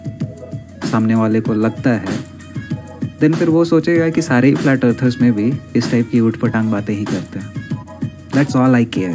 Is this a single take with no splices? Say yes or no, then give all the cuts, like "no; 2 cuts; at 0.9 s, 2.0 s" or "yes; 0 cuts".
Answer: yes; 0 cuts